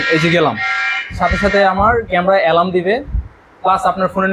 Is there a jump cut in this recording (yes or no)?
no